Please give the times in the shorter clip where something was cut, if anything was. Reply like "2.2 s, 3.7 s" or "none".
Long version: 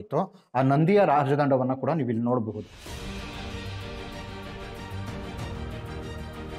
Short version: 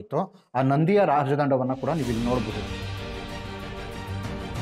2.6 s

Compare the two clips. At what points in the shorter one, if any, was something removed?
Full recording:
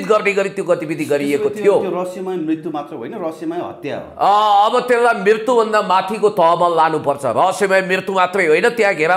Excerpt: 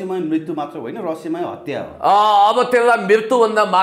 none

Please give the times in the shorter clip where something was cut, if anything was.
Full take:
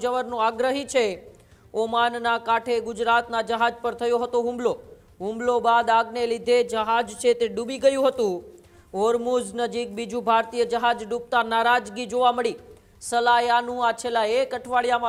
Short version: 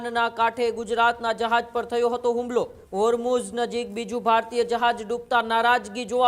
2.8 s

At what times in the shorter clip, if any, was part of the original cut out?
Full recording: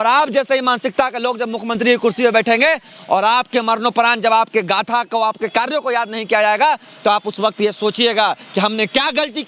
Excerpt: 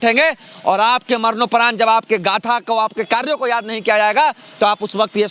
none

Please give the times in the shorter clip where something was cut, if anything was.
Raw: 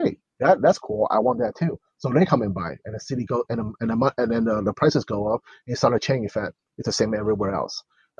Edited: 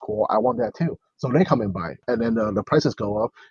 2.0 s

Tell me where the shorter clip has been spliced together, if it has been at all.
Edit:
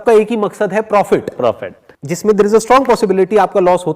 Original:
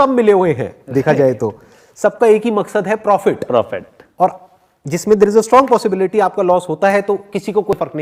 1.4 s

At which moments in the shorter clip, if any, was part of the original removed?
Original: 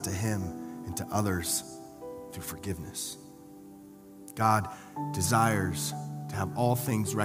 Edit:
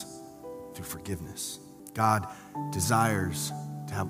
1.8 s

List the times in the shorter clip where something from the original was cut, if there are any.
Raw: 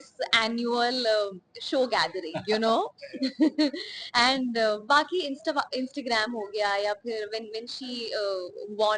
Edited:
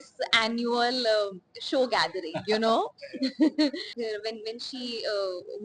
4.0 s

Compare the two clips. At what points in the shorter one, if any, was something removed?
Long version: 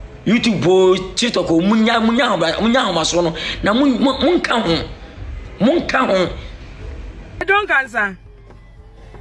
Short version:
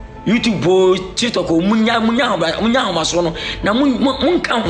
none

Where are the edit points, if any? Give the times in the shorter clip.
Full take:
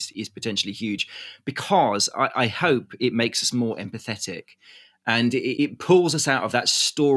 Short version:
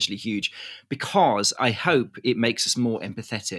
1.5 s

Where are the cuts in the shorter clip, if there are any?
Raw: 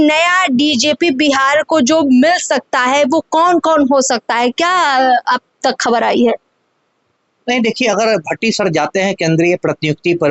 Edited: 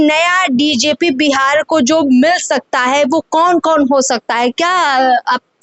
none

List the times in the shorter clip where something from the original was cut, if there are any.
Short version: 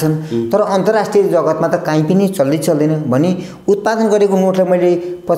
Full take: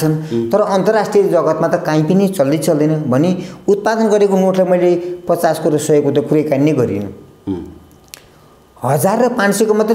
none

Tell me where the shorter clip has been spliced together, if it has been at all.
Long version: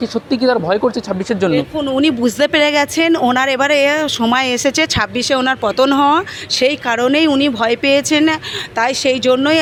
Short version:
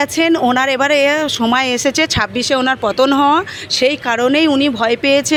none

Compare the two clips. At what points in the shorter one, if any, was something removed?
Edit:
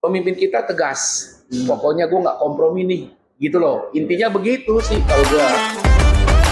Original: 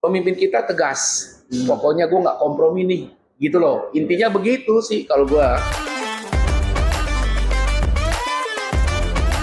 5.5 s

